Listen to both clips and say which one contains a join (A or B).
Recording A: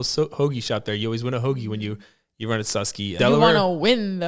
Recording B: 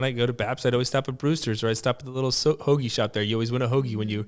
A